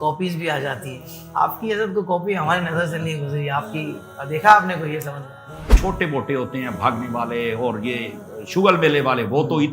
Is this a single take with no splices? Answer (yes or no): no